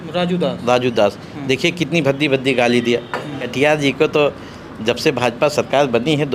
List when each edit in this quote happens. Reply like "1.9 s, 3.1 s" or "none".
3.4 s